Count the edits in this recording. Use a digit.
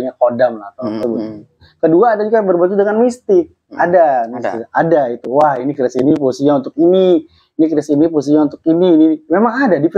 1